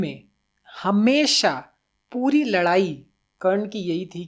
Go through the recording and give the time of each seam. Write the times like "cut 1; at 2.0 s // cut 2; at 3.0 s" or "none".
none